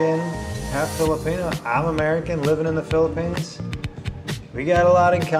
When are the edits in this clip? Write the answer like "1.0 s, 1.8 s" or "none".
none